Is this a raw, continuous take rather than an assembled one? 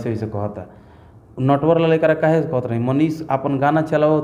yes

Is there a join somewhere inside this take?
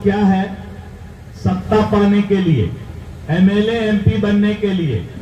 no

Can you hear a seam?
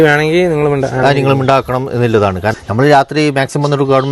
yes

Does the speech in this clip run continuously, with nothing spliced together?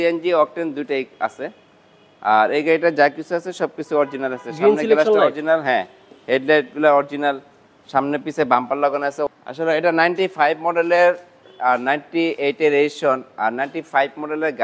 no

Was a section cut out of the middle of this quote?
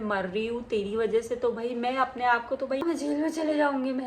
yes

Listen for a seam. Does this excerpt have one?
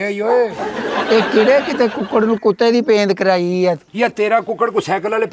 no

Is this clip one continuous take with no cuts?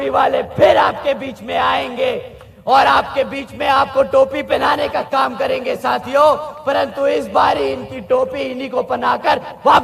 yes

